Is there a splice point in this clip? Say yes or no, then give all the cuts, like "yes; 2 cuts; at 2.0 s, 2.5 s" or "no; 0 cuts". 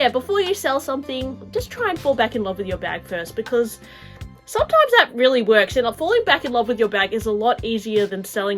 no; 0 cuts